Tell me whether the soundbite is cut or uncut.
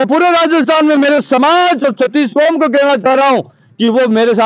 uncut